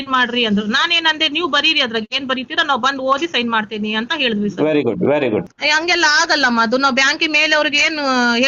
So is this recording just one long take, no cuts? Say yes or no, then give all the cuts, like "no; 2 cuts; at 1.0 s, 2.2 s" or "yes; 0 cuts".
no; 1 cut; at 5.6 s